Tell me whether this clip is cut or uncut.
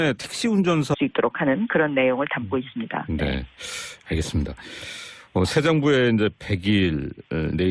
uncut